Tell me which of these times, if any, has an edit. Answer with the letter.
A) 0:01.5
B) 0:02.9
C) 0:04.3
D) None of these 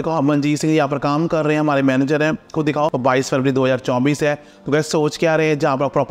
B